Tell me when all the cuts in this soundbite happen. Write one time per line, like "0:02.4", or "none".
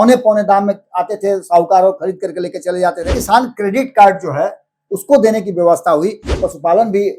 0:03.1
0:06.3